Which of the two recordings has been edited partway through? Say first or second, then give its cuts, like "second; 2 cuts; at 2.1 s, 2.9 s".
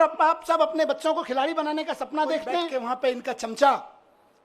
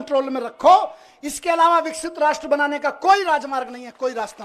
first; 1 cut; at 2.7 s